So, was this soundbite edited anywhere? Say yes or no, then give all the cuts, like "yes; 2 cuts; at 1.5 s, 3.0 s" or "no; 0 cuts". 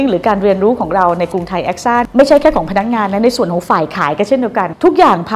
no; 0 cuts